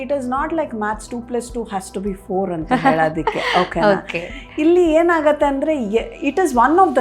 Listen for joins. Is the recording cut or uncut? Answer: uncut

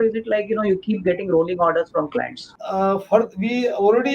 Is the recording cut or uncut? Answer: cut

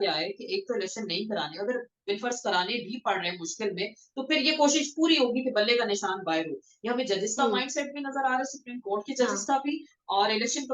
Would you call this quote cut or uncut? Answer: uncut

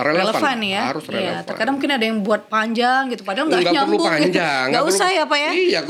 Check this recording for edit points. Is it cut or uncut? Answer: uncut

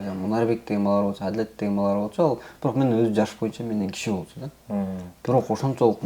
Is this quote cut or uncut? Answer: uncut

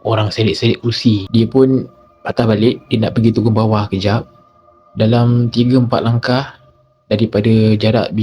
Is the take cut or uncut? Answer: cut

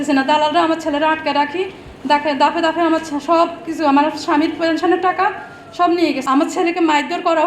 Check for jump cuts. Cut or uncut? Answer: cut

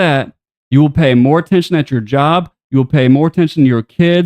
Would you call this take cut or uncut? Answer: uncut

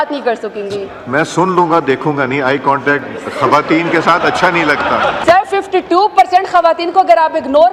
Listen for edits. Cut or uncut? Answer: cut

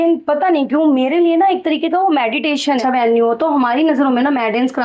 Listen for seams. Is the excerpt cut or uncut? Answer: cut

